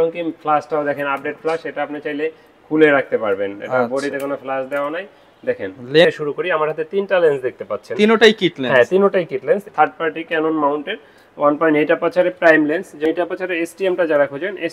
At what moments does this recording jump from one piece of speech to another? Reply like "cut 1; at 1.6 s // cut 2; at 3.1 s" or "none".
cut 1; at 6.1 s // cut 2; at 9.7 s // cut 3; at 13.0 s